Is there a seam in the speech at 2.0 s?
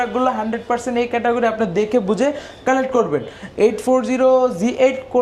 no; 0 cuts

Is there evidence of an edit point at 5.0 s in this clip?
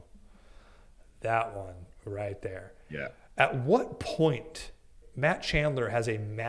yes; 1 cut; at 5.0 s

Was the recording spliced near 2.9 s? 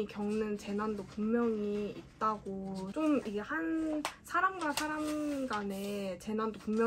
yes; 1 cut; at 2.9 s

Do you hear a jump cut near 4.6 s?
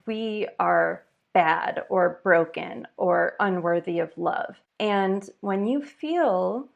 yes; 1 cut; at 4.6 s

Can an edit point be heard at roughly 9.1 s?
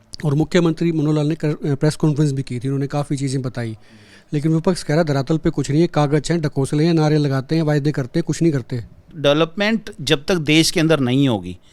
yes; 1 cut; at 9.1 s

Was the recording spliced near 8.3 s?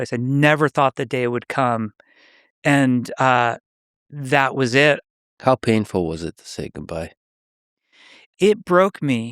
yes; 2 cuts; at 5.0 s, 8.3 s

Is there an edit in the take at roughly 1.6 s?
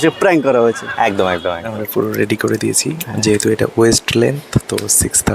yes; 1 cut; at 1.6 s

